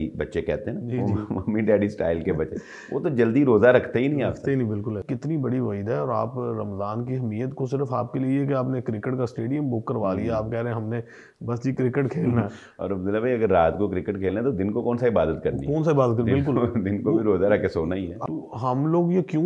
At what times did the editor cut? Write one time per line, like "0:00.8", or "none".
0:05.0
0:18.1